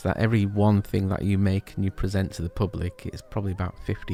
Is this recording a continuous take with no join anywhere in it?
yes; 0 cuts

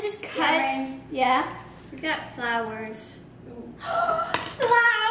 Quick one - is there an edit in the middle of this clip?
no; 0 cuts

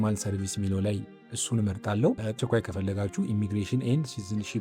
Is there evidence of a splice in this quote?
yes; 1 cut; at 2.4 s

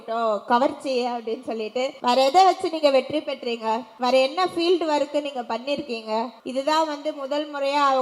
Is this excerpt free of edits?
no; 3 cuts; at 2.0 s, 3.9 s, 6.4 s

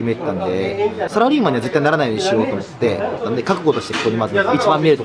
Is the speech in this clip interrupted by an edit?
yes; 2 cuts; at 1.1 s, 3.2 s

